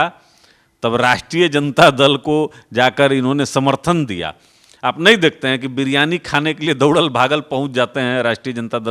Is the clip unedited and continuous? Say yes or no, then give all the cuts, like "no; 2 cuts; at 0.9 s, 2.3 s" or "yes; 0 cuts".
yes; 0 cuts